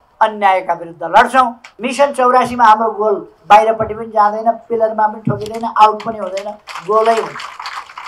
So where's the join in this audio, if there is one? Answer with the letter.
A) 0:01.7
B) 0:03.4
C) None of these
A